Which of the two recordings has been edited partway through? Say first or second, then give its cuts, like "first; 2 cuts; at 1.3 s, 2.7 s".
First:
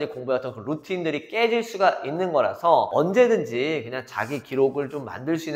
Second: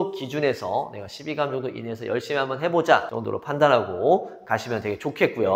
first; 1 cut; at 2.9 s